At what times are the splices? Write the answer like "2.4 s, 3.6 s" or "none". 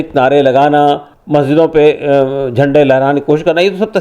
1.1 s